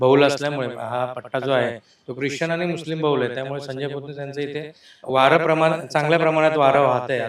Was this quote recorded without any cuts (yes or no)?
yes